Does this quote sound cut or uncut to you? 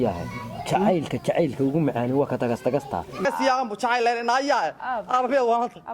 cut